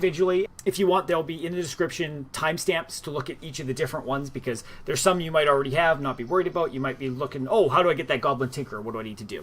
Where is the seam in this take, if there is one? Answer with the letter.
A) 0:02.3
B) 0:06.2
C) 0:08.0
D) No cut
B